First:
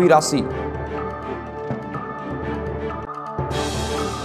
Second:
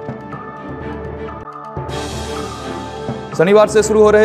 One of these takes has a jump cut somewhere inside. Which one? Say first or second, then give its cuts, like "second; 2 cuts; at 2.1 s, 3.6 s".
second; 1 cut; at 1.4 s